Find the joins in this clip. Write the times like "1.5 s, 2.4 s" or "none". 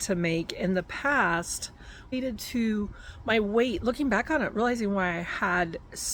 2.1 s